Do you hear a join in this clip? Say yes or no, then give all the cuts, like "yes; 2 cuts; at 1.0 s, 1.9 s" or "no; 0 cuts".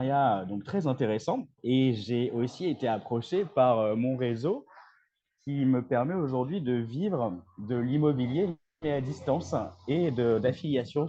yes; 1 cut; at 1.5 s